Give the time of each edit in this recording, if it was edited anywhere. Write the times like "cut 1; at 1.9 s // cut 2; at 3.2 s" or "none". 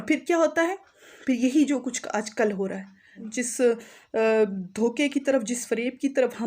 cut 1; at 3.2 s